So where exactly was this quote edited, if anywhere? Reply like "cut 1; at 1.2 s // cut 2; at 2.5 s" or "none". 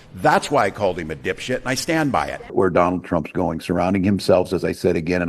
cut 1; at 2.5 s